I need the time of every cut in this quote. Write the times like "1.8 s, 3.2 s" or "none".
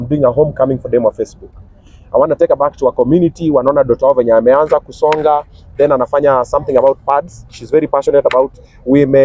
none

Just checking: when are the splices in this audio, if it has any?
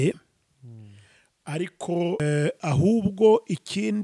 2.2 s

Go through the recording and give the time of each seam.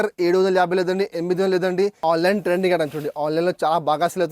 2.0 s

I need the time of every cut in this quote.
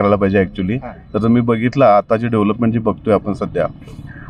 none

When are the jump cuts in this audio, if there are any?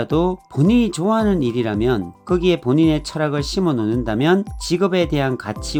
none

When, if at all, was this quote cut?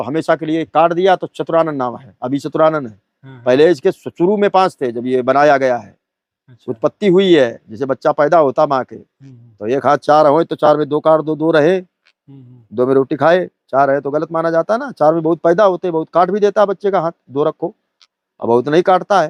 none

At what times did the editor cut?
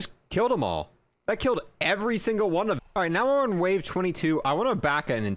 2.8 s

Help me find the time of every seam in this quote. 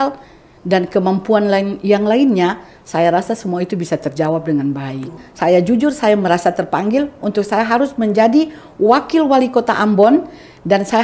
5.2 s

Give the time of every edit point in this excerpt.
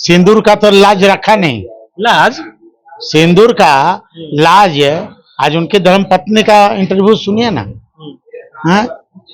none

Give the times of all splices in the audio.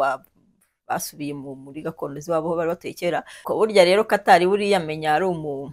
3.4 s

